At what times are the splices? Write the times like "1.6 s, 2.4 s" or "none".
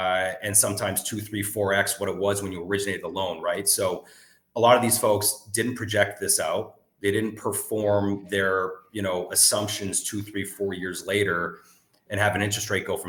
none